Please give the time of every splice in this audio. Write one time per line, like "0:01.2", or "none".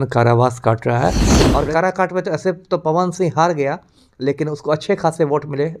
0:01.3